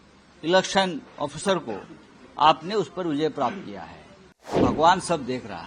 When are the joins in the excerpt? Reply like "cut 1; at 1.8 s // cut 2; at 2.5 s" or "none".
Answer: cut 1; at 4.6 s